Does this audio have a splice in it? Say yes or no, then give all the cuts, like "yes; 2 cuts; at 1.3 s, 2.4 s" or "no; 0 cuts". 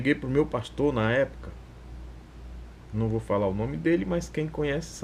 no; 0 cuts